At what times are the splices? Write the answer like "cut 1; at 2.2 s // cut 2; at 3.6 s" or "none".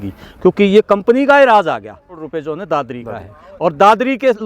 cut 1; at 2.2 s